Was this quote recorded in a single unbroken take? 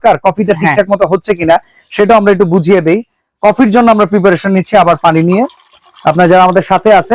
yes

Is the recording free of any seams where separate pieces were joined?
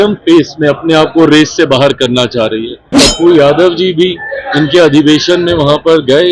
no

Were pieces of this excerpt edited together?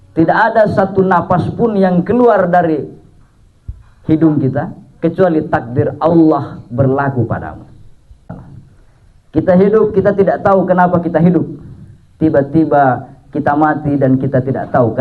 yes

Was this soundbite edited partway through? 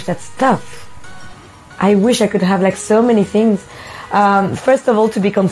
no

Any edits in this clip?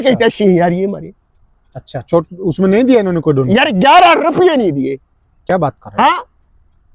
no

